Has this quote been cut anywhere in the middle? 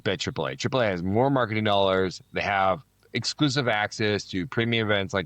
no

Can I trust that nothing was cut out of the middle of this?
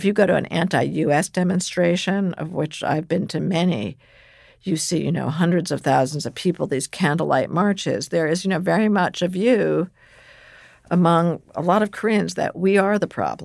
yes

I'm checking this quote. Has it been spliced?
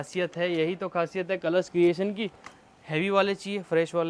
no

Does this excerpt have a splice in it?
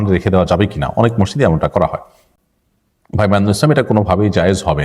no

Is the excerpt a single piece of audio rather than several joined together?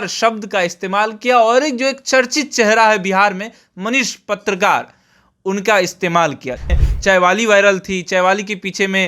no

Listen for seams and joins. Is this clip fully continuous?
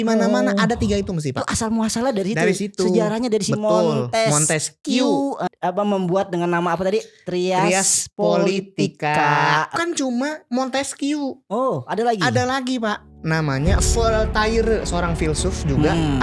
no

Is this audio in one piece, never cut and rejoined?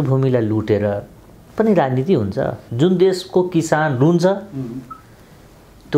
no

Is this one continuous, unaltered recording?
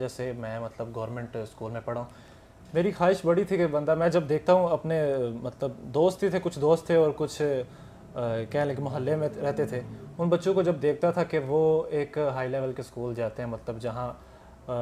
yes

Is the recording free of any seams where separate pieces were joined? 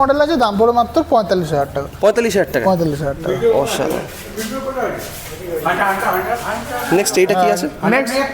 yes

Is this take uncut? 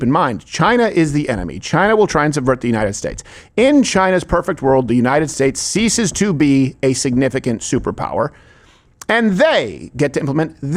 yes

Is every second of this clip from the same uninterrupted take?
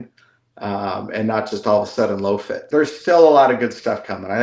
no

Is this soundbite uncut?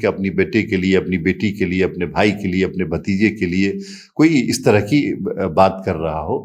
yes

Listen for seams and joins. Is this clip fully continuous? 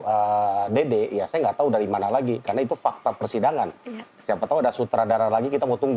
yes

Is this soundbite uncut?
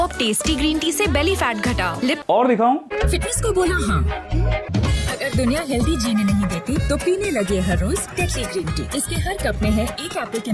yes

